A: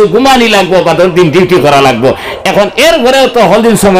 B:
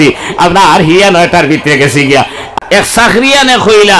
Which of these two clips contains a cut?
B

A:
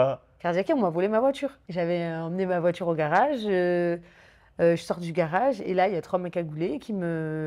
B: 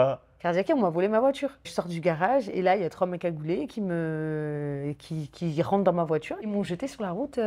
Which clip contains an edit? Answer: B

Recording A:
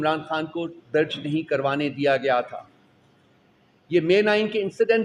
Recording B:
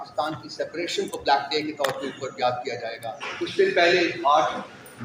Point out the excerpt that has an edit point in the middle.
B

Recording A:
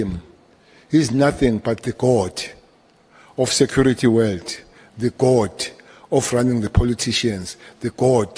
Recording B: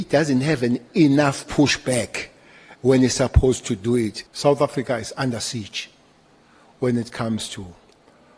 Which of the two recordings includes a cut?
B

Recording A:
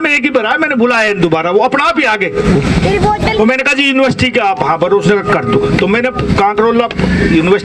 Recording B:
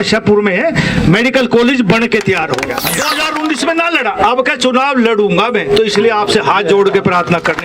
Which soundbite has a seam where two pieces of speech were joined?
B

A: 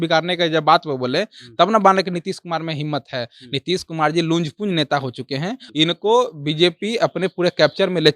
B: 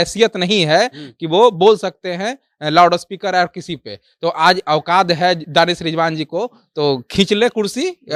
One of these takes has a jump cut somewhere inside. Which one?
A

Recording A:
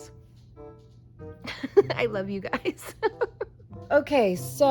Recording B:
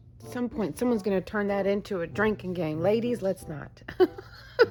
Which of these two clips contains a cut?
A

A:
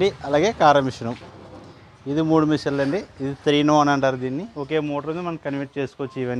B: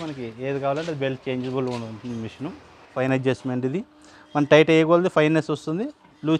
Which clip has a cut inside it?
B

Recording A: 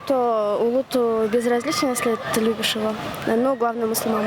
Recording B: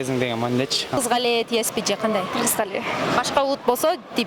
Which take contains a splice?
B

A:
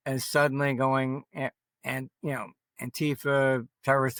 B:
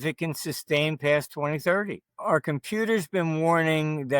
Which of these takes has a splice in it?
B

